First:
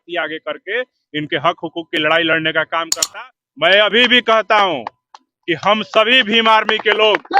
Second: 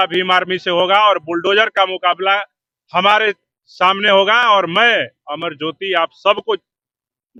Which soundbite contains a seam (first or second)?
first